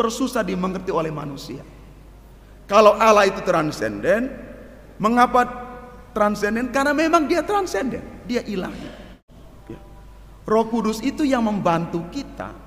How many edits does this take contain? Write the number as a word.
one